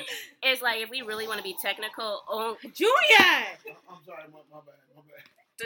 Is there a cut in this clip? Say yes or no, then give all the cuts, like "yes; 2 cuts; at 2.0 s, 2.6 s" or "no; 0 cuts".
no; 0 cuts